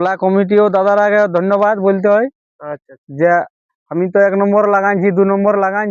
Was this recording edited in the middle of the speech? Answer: no; 0 cuts

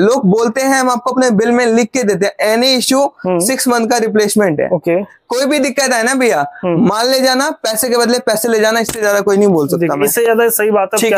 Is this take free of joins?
yes; 0 cuts

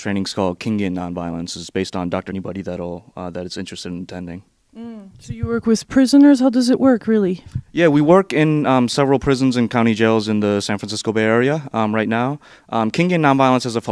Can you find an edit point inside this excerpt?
no; 0 cuts

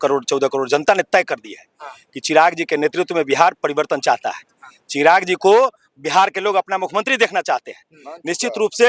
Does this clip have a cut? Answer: no; 0 cuts

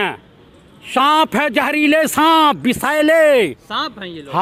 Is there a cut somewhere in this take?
no; 0 cuts

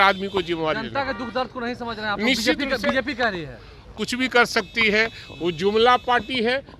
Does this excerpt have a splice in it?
yes; 1 cut; at 3.9 s

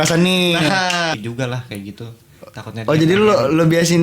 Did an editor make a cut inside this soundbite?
yes; 1 cut; at 1.1 s

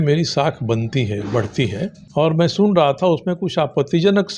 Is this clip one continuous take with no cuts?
no; 1 cut; at 2.0 s

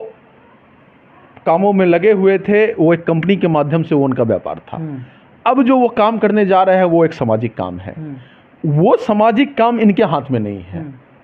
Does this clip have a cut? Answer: no; 0 cuts

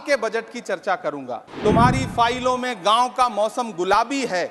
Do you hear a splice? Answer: yes; 1 cut; at 1.4 s

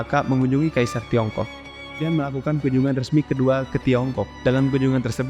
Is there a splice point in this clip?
yes; 1 cut; at 2.0 s

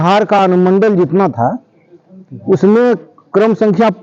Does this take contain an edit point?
no; 0 cuts

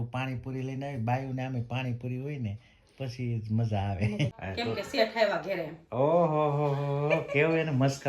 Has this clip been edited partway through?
yes; 2 cuts; at 4.3 s, 5.8 s

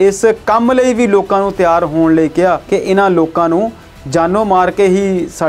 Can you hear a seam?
yes; 1 cut; at 2.6 s

